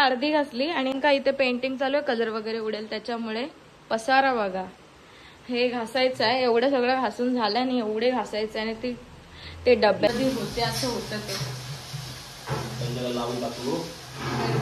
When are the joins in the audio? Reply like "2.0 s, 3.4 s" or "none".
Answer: 0.9 s, 10.1 s